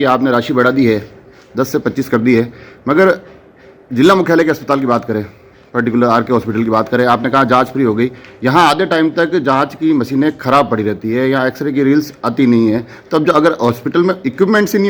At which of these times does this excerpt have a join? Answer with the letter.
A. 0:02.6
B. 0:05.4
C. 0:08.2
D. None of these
D